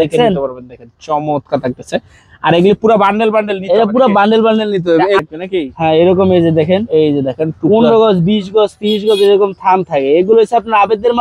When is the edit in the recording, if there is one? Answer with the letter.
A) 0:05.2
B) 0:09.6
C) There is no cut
A